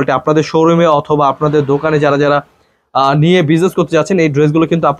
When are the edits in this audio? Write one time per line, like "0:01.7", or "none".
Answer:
none